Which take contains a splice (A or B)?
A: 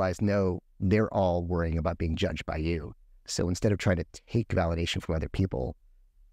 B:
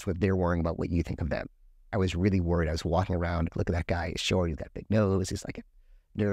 B